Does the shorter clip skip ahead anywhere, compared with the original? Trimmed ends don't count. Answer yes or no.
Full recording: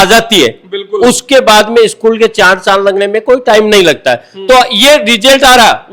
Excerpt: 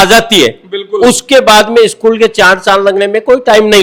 no